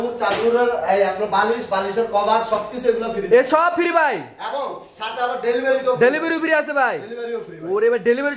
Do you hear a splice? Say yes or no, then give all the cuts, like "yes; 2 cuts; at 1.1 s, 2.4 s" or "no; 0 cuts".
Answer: no; 0 cuts